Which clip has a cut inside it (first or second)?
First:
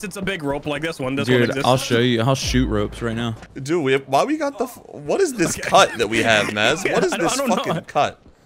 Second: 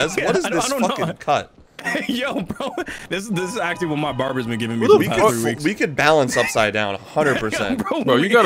first